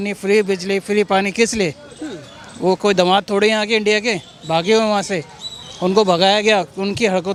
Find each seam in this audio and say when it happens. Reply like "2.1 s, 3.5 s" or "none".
none

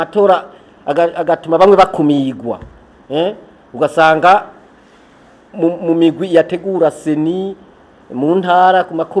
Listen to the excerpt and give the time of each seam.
none

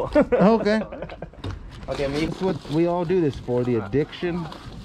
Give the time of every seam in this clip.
2.3 s

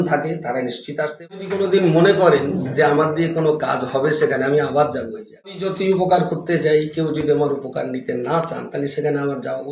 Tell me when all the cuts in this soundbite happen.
1.3 s, 5.7 s

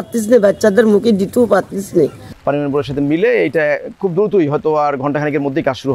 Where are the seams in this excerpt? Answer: 2.3 s

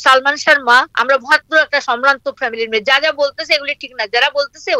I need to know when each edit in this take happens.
0.9 s

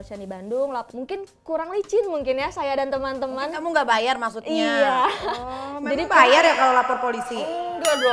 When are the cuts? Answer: 0.9 s

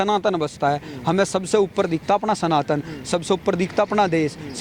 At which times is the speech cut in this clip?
none

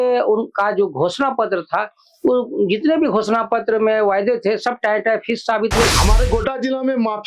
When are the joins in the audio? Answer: 5.9 s

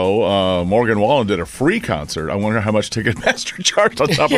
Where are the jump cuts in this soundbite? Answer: none

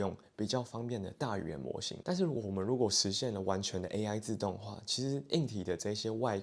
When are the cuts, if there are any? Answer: 1.9 s

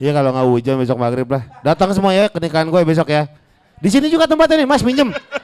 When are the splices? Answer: none

